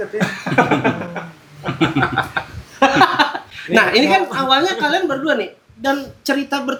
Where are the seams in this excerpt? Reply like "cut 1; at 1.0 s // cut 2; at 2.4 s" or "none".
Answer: none